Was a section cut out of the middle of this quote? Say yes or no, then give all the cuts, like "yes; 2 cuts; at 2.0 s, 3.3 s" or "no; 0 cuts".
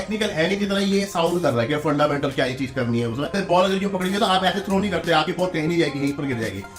yes; 1 cut; at 3.3 s